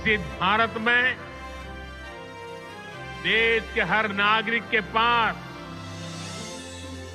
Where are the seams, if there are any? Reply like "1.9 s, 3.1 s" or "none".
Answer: 1.2 s, 3.3 s